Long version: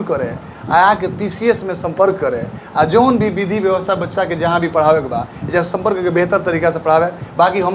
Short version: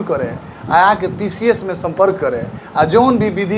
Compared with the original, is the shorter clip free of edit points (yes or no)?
yes